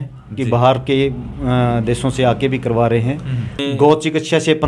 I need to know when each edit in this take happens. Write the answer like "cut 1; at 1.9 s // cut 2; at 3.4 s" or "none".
cut 1; at 3.5 s